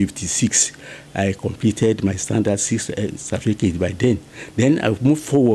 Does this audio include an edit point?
no; 0 cuts

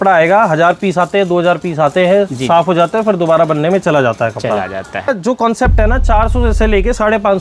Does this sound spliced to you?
yes; 1 cut; at 5.1 s

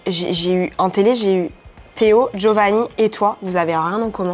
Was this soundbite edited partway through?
no; 0 cuts

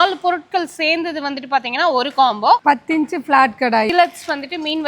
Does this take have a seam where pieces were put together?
yes; 2 cuts; at 2.6 s, 3.9 s

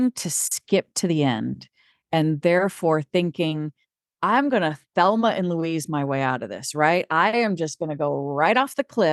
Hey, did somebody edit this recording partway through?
no; 0 cuts

